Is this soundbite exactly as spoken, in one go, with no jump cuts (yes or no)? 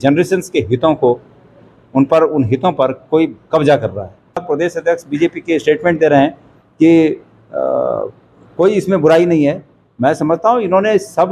no